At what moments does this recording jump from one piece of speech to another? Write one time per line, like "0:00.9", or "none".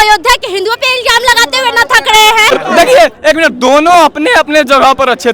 0:02.5